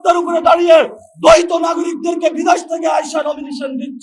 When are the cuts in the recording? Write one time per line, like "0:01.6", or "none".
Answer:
none

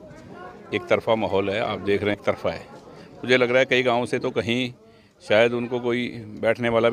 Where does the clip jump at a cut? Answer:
0:02.2

